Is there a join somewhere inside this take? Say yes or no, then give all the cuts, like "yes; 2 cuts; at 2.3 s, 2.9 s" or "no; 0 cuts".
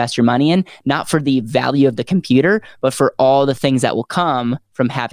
no; 0 cuts